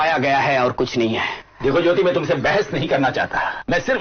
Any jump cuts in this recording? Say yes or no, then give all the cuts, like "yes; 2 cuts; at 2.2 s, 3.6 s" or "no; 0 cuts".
no; 0 cuts